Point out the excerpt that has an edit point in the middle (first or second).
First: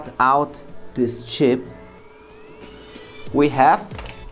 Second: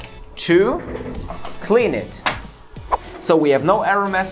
second